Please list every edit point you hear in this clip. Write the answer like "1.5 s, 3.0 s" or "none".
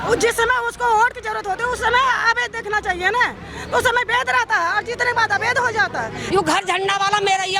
6.2 s